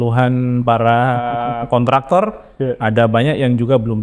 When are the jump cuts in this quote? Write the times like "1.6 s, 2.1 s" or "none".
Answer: none